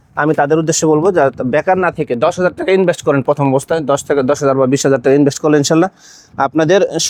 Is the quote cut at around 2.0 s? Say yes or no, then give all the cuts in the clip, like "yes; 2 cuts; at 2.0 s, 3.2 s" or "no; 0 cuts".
no; 0 cuts